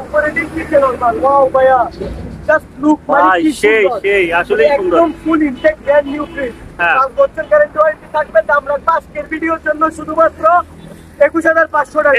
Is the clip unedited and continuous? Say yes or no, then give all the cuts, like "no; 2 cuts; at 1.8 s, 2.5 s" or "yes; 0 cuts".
yes; 0 cuts